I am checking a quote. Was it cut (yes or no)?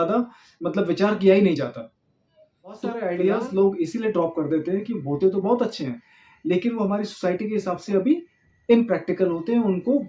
yes